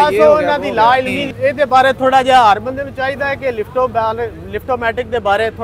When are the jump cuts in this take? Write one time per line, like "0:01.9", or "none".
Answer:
0:01.2

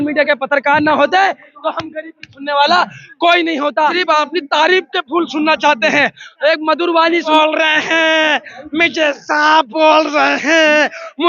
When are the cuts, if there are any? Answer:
0:03.9
0:07.3

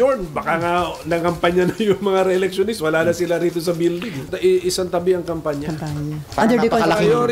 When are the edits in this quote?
0:04.3
0:06.2

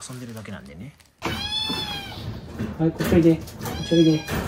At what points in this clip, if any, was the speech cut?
0:01.2

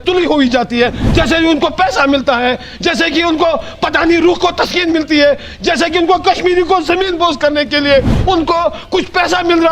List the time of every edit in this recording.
none

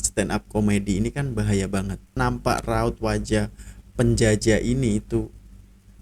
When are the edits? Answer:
0:02.2

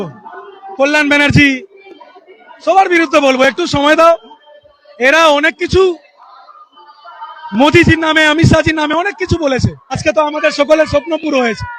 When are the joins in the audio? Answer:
0:10.0

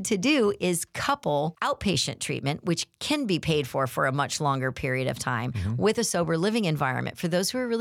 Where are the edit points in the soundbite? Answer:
0:01.6

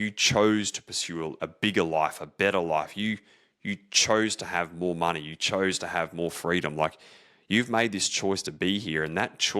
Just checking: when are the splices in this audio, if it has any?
0:01.4

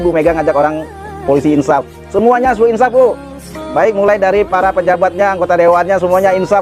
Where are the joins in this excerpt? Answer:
none

